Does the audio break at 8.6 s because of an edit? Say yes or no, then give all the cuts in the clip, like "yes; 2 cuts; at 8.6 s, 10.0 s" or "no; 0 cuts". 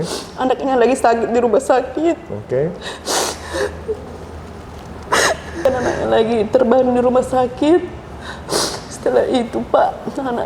no; 1 cut; at 5.7 s